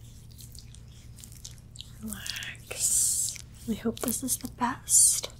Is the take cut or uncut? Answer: uncut